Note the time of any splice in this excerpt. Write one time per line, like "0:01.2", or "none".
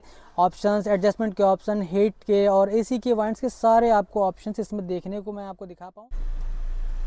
0:05.9

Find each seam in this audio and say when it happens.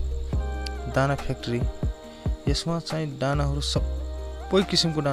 none

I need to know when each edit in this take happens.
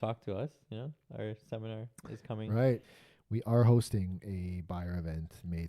0:02.9

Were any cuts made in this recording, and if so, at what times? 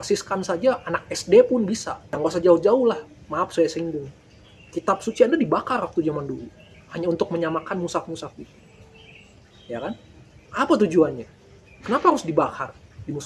0:02.2

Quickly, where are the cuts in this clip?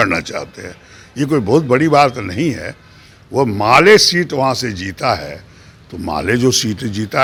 none

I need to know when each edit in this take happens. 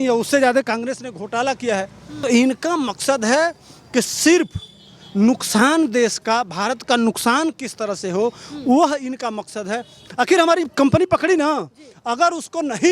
0:02.1
0:10.0

